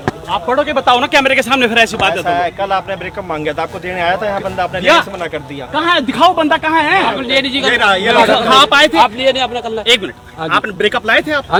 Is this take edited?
no; 0 cuts

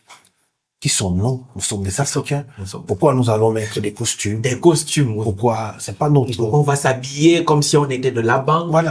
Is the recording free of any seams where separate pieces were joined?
yes; 0 cuts

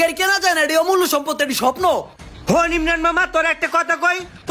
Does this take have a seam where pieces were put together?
no; 0 cuts

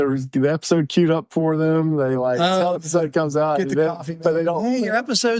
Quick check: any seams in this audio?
yes; 1 cut; at 2.8 s

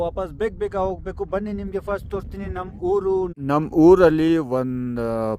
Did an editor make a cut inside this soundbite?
yes; 1 cut; at 3.3 s

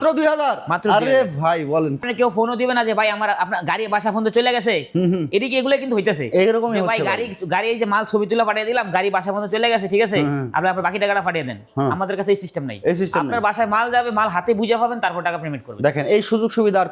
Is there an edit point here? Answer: yes; 1 cut; at 2.0 s

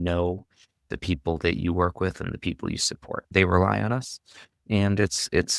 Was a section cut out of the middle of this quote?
yes; 1 cut; at 3.3 s

